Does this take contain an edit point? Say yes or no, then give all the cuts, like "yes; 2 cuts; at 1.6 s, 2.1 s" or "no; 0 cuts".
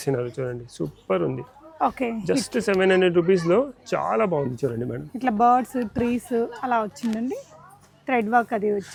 no; 0 cuts